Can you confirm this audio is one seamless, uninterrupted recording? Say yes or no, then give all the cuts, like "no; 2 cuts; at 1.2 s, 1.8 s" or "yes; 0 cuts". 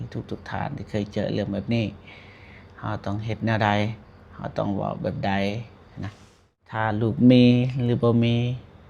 no; 1 cut; at 6.8 s